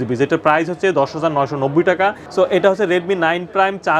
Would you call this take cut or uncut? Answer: cut